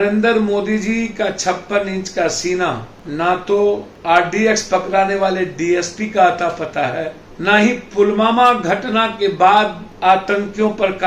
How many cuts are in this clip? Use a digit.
4